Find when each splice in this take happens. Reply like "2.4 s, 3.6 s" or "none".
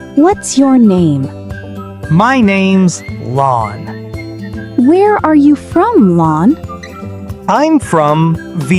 none